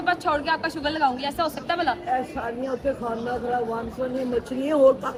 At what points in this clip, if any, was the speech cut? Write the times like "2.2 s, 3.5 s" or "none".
none